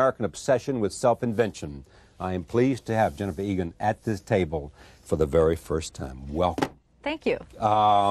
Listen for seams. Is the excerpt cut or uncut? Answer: uncut